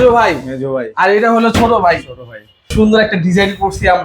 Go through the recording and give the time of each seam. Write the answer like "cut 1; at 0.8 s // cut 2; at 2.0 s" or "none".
cut 1; at 2.7 s